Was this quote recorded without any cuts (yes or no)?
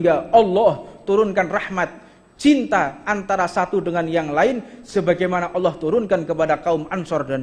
yes